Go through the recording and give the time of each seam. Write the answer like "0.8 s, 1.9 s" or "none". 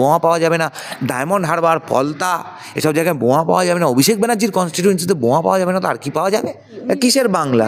6.7 s